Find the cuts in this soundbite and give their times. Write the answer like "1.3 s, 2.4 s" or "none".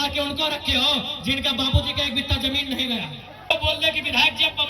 3.5 s